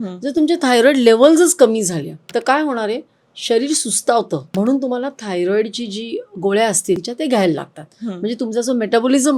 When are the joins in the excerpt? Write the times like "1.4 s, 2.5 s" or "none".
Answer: 2.2 s, 4.5 s, 7.1 s

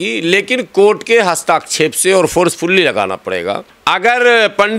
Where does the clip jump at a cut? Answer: none

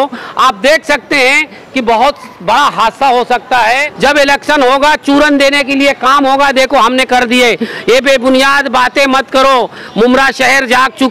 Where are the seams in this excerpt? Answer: 3.9 s

